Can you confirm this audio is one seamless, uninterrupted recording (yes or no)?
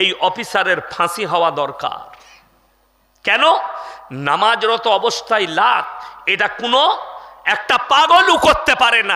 yes